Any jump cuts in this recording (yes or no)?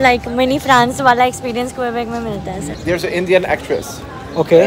yes